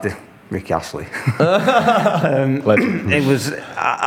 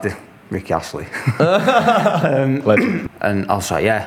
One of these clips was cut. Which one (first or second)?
second